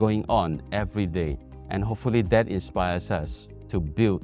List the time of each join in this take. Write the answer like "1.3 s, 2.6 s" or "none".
1.5 s